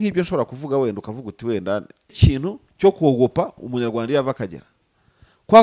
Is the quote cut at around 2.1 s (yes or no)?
yes